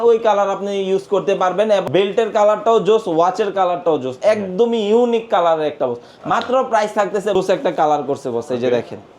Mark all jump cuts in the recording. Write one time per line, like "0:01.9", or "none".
0:01.8
0:07.4